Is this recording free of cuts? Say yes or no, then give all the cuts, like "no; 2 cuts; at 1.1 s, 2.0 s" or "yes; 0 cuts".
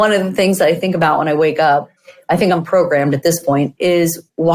yes; 0 cuts